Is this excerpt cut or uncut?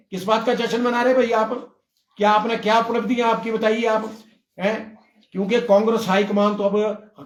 uncut